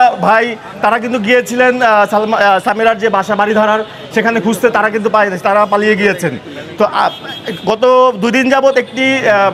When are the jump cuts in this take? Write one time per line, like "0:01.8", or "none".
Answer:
none